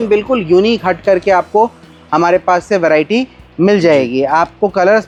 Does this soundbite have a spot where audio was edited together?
no; 0 cuts

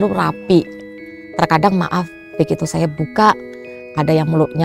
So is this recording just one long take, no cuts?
yes; 0 cuts

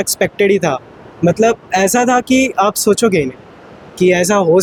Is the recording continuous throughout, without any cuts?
yes; 0 cuts

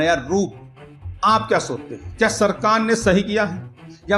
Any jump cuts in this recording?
no; 0 cuts

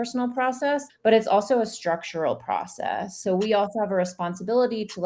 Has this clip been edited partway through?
yes; 2 cuts; at 0.9 s, 3.2 s

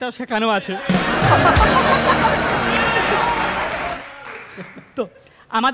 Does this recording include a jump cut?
yes; 1 cut; at 4.0 s

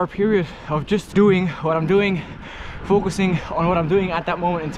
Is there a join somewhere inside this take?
yes; 1 cut; at 1.1 s

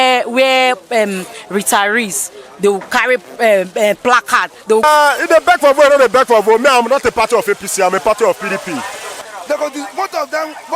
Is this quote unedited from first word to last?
no; 2 cuts; at 4.8 s, 9.2 s

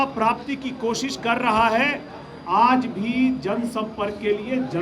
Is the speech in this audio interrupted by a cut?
no; 0 cuts

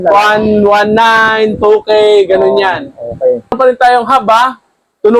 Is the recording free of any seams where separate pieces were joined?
no; 1 cut; at 3.5 s

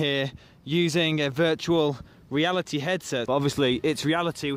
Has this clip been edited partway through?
yes; 1 cut; at 3.2 s

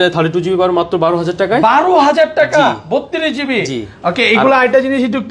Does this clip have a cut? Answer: no; 0 cuts

